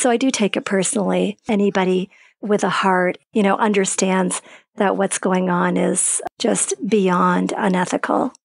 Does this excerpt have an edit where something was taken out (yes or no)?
yes